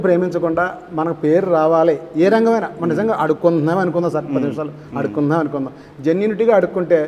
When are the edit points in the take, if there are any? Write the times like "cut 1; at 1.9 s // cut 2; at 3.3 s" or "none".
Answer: none